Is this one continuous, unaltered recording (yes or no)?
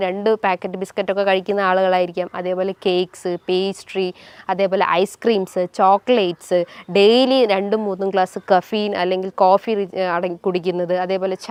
yes